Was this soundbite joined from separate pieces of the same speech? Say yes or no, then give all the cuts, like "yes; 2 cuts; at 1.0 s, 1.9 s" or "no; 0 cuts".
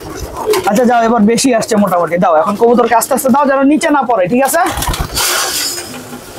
no; 0 cuts